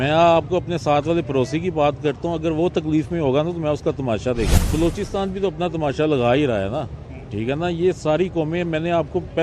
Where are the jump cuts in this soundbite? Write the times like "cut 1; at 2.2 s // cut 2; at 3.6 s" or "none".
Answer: cut 1; at 4.6 s